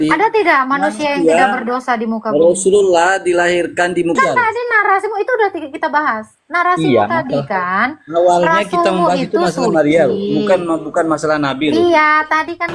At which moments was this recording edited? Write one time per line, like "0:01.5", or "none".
0:04.2